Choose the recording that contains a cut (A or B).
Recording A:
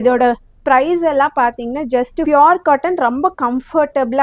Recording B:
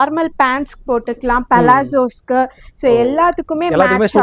A